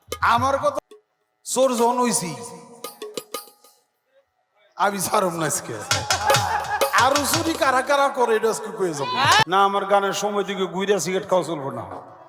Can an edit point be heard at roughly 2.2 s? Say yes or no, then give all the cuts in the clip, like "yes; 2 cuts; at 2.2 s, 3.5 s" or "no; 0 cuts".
no; 2 cuts; at 0.7 s, 9.4 s